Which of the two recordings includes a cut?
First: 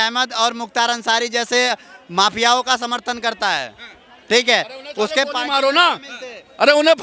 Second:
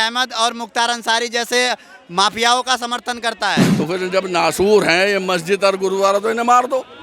second; 1 cut; at 3.7 s

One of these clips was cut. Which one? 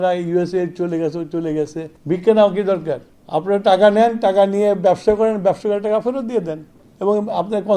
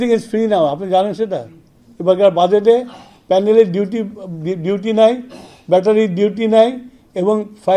first; 1 cut; at 1.9 s

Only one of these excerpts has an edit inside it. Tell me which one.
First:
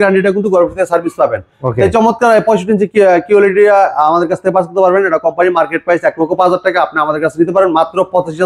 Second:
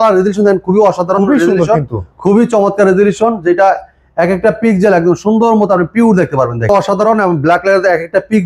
second; 1 cut; at 6.7 s

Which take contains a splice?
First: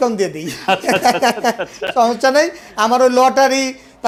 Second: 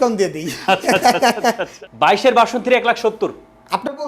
second; 1 cut; at 1.7 s

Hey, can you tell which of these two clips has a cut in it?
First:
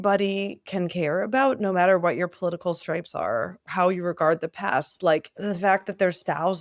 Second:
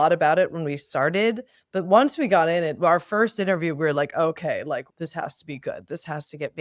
first; 2 cuts; at 3.6 s, 5.3 s

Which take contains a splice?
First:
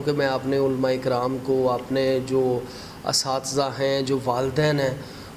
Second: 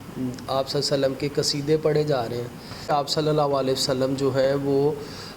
second; 1 cut; at 2.9 s

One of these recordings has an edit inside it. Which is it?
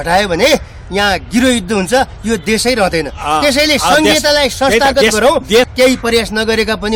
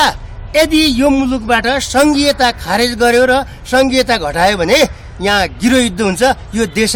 first; 1 cut; at 5.7 s

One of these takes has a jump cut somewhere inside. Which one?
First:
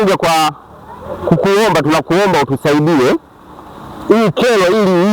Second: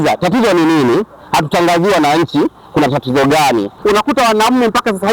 second; 1 cut; at 3.7 s

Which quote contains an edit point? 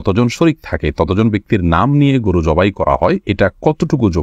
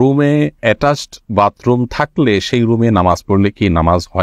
first; 1 cut; at 3.2 s

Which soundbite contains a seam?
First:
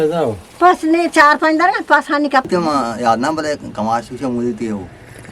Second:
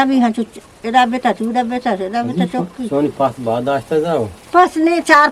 first; 1 cut; at 2.5 s

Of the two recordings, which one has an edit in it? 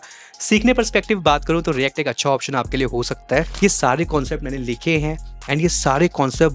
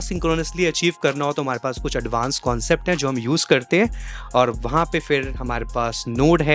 first; 1 cut; at 3.5 s

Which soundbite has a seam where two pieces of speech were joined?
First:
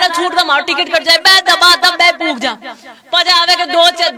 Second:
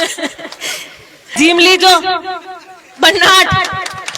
second; 1 cut; at 1.3 s

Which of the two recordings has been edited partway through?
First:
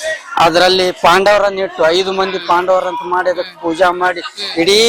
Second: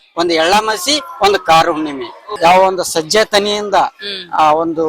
second; 1 cut; at 2.2 s

